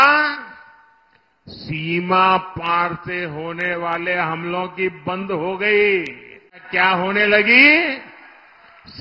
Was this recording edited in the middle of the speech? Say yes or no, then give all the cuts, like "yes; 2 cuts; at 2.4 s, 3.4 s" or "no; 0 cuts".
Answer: yes; 1 cut; at 6.7 s